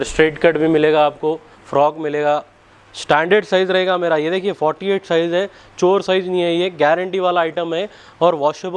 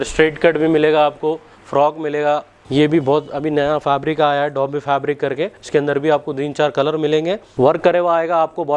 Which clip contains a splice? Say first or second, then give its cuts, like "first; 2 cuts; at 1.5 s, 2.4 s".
second; 3 cuts; at 2.5 s, 5.6 s, 7.5 s